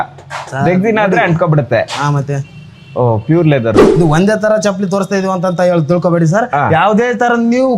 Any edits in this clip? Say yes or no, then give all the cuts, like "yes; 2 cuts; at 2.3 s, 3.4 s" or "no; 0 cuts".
yes; 1 cut; at 3.9 s